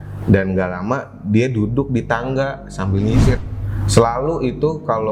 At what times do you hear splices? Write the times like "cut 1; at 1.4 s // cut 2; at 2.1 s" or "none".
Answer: cut 1; at 3.4 s